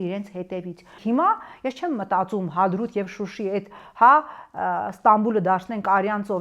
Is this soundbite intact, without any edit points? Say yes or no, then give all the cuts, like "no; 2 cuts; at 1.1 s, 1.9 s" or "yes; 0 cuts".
no; 1 cut; at 0.9 s